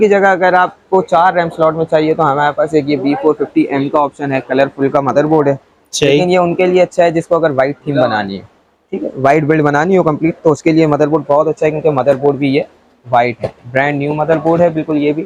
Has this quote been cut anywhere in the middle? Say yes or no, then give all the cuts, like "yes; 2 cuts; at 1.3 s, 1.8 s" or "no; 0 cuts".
no; 0 cuts